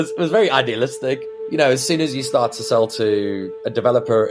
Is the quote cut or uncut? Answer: cut